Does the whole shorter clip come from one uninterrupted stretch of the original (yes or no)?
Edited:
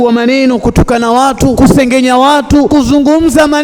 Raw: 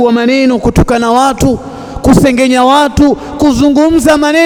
no